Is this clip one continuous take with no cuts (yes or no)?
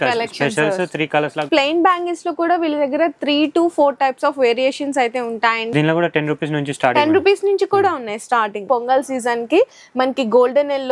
no